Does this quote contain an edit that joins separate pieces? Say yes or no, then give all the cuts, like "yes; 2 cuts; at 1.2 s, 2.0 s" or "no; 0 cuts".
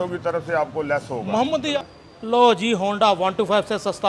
yes; 1 cut; at 1.7 s